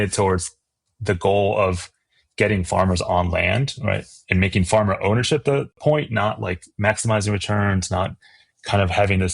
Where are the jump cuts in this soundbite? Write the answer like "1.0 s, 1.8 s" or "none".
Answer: 5.8 s